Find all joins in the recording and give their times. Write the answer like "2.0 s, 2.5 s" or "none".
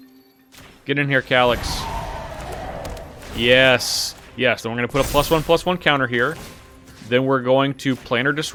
none